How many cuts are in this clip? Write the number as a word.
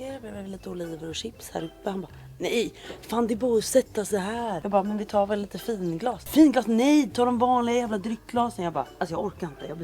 three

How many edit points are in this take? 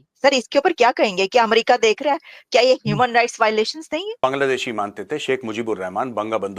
one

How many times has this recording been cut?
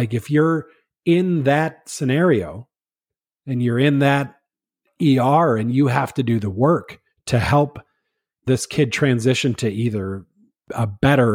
one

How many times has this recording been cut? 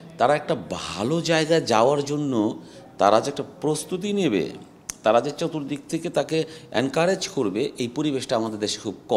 zero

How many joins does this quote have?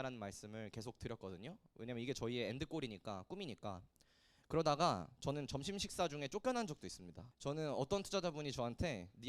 zero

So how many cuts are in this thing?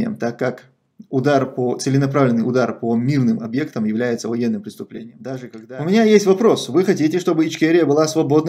one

